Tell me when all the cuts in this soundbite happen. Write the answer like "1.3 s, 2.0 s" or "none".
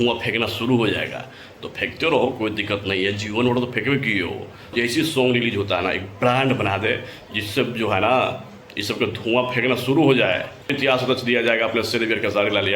4.7 s, 10.7 s